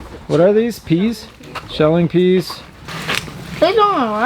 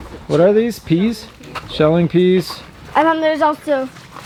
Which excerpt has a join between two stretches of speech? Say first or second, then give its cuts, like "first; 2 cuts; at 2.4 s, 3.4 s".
first; 1 cut; at 2.8 s